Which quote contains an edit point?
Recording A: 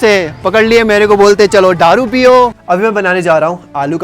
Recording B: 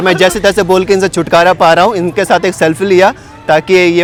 A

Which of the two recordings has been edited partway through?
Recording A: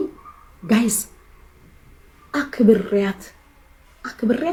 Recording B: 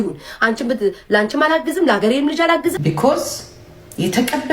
B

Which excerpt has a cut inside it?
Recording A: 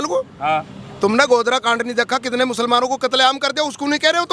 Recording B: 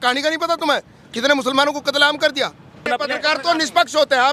B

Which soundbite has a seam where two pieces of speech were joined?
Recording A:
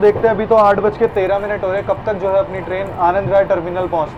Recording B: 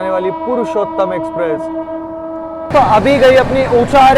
B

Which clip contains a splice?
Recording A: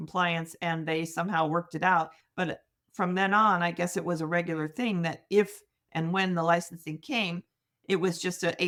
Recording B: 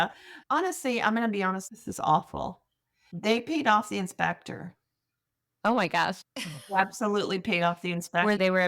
B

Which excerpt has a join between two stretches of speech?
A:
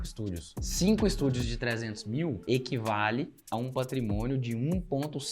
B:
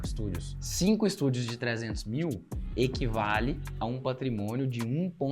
A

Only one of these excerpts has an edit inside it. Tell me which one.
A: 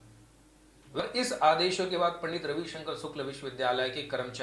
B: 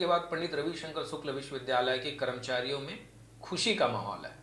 A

